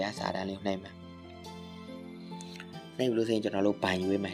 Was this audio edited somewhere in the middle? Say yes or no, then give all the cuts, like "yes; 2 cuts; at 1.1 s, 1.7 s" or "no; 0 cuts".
no; 0 cuts